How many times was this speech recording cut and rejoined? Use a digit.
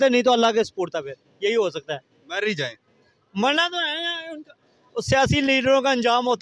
0